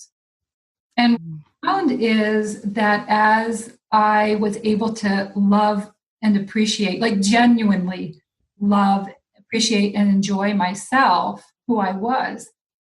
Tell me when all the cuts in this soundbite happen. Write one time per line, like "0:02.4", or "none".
0:01.2

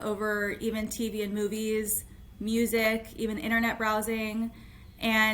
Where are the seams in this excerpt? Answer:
none

